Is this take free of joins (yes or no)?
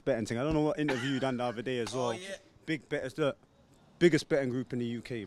yes